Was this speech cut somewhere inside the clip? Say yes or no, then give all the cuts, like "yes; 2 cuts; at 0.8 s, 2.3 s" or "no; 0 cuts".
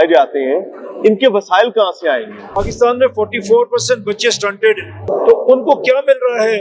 yes; 2 cuts; at 2.6 s, 5.0 s